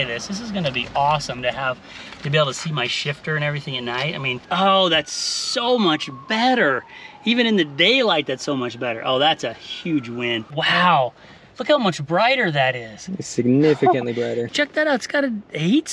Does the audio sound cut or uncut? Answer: cut